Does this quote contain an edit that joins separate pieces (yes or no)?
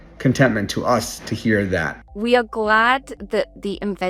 yes